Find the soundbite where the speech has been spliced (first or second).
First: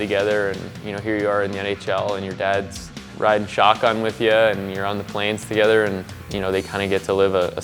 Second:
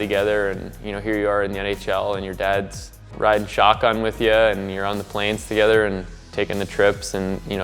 first